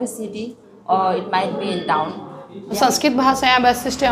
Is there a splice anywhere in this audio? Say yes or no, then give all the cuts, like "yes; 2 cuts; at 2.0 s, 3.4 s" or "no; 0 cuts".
yes; 1 cut; at 2.6 s